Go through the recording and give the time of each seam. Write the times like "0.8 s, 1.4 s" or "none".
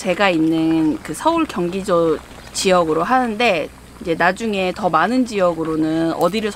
none